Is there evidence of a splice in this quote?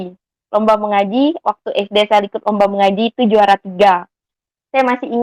no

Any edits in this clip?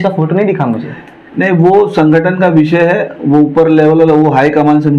no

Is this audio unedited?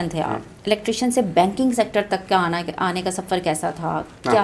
yes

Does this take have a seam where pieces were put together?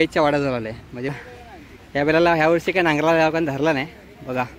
yes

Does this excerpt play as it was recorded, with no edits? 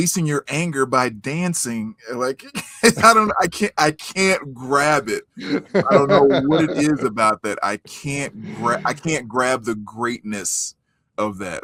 yes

